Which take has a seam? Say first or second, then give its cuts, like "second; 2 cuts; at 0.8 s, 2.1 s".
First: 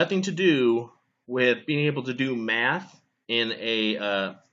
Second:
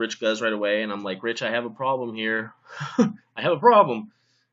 first; 1 cut; at 1.7 s